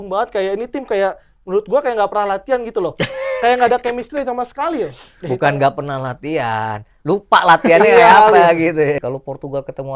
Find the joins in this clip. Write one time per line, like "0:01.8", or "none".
0:09.0